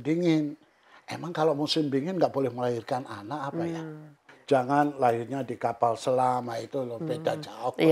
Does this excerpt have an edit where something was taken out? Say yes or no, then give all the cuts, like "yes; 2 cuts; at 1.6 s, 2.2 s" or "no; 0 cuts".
yes; 1 cut; at 4.3 s